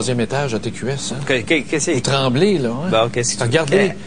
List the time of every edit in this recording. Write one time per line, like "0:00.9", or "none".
none

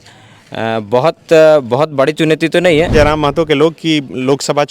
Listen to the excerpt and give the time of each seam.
0:02.9

